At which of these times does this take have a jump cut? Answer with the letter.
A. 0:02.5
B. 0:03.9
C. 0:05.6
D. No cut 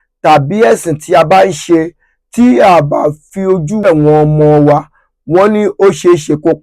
B